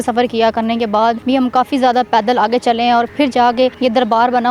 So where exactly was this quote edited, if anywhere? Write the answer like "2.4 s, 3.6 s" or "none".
1.2 s, 3.8 s